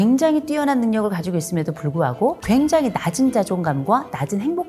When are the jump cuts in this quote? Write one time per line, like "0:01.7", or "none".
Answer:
0:02.4